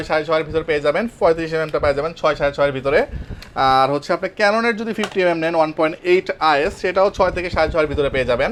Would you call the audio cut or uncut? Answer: uncut